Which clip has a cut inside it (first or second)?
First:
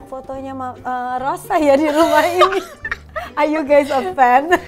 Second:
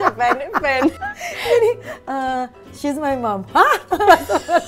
second